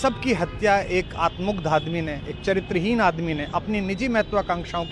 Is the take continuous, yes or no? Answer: yes